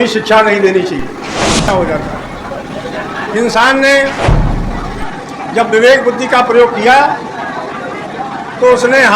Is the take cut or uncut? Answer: cut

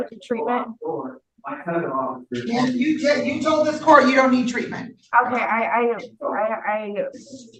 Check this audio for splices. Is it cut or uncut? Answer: uncut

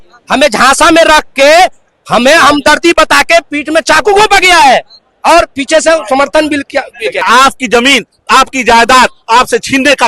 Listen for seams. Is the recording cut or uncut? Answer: cut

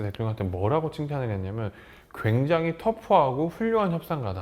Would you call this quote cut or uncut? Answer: uncut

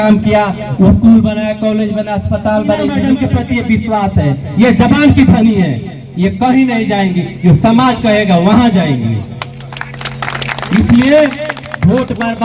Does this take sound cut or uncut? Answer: cut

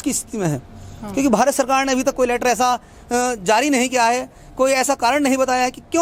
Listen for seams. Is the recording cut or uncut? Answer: uncut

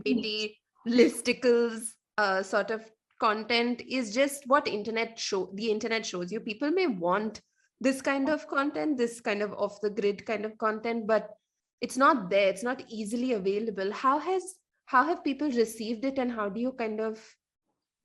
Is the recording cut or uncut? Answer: uncut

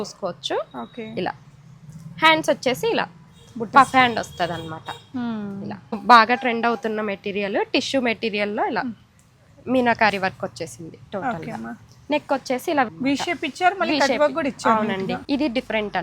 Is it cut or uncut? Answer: cut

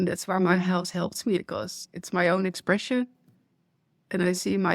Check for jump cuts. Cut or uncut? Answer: cut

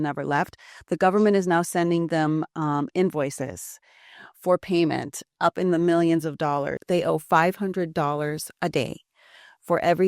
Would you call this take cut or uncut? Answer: cut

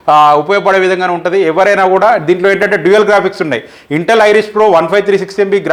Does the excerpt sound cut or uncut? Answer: uncut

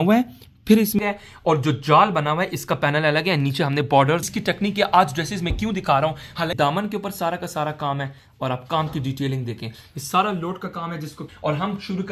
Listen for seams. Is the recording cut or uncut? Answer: cut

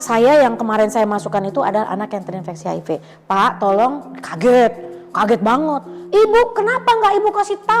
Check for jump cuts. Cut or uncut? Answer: uncut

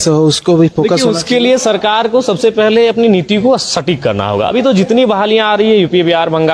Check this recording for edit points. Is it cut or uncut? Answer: uncut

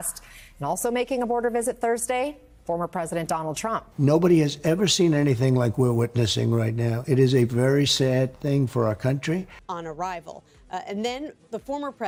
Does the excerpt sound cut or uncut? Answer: uncut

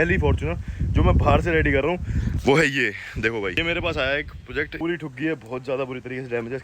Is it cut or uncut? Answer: cut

